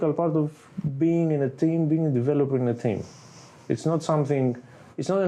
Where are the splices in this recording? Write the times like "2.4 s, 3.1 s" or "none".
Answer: none